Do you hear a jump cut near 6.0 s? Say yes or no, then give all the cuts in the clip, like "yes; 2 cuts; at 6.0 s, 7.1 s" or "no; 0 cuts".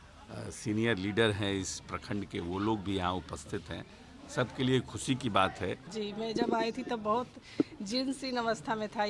yes; 1 cut; at 6.0 s